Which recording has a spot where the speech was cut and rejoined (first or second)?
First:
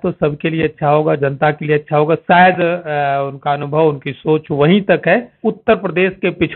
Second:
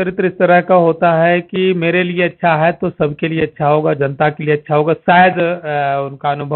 first